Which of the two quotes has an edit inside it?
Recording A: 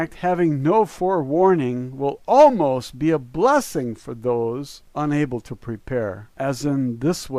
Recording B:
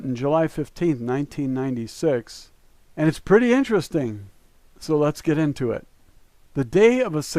B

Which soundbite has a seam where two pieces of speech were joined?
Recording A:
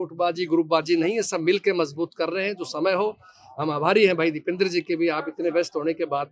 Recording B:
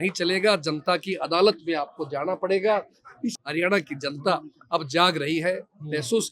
B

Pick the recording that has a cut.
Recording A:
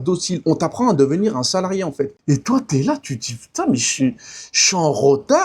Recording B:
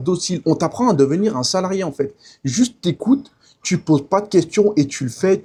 A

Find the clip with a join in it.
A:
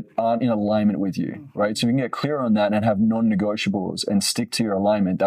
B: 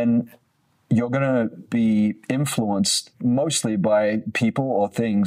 B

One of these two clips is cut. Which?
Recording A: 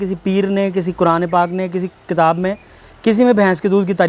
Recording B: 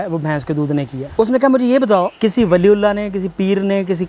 B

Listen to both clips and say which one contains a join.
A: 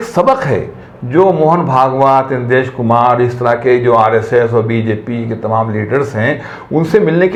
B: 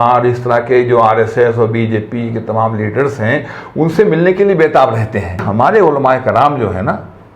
B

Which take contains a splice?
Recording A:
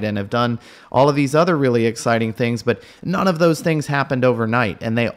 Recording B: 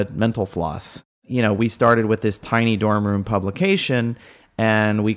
B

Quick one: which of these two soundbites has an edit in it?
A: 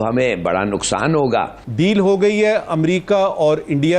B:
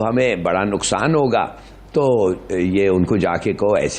A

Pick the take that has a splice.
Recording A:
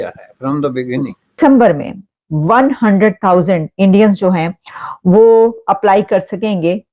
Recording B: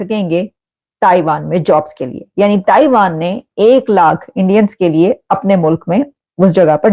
A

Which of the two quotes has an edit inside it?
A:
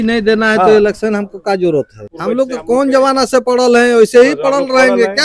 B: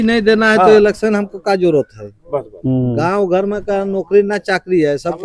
A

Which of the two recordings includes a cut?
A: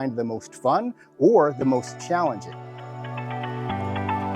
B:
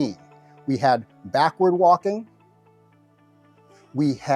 A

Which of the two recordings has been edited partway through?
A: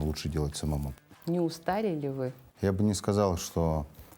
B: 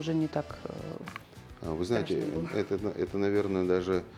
A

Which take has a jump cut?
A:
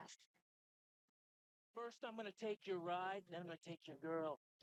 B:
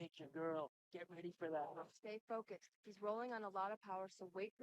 B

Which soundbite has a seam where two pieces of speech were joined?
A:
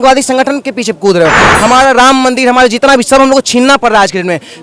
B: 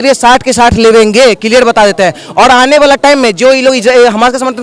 A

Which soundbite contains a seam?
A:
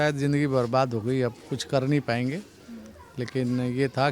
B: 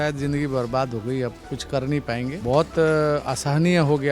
B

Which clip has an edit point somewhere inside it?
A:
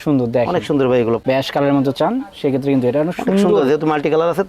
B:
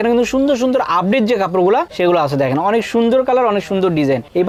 A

